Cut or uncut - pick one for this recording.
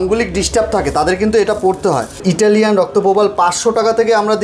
cut